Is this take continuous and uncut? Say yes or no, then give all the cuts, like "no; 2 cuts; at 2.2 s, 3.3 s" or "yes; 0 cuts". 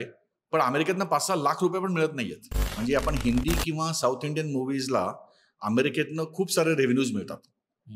no; 1 cut; at 2.7 s